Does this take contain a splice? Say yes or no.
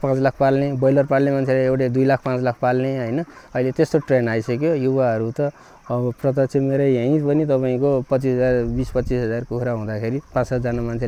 no